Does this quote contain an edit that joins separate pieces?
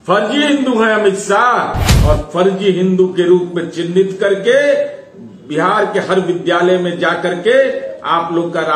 yes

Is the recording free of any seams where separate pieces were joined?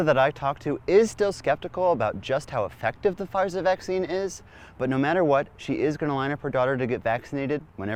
yes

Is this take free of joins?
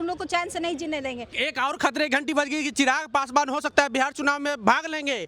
no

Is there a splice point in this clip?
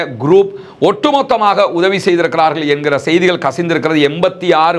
no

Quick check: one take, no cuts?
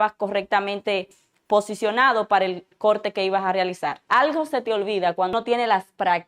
no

